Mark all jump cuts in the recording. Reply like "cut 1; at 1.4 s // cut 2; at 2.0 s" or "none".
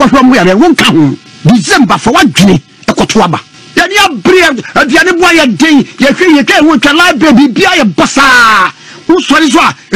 cut 1; at 1.3 s // cut 2; at 3.5 s